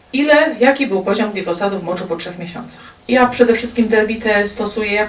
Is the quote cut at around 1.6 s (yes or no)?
no